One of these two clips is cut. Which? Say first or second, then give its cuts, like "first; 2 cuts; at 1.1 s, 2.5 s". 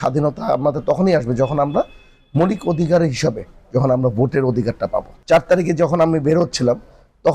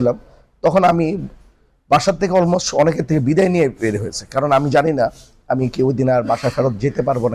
first; 1 cut; at 5.1 s